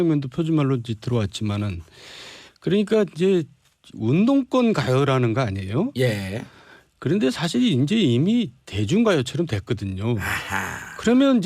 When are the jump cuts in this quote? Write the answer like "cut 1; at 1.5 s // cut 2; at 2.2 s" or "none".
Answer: cut 1; at 5.0 s